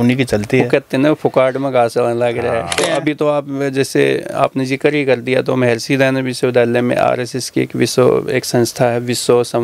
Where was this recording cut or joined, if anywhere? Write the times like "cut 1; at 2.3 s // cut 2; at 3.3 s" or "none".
cut 1; at 2.8 s